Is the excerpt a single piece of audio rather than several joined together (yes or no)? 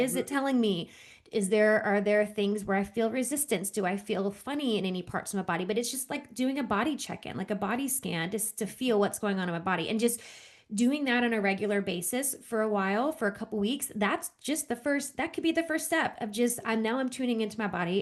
yes